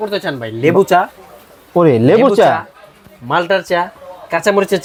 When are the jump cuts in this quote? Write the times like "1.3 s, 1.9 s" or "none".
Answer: none